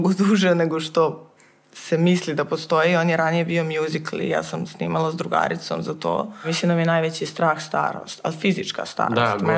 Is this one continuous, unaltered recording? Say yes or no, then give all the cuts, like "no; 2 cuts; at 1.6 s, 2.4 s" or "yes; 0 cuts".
no; 1 cut; at 6.5 s